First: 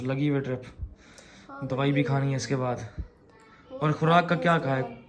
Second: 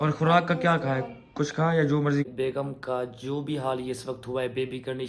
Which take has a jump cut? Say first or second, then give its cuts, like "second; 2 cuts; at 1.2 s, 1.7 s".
second; 1 cut; at 2.3 s